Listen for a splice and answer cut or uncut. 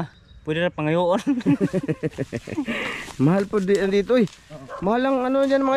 uncut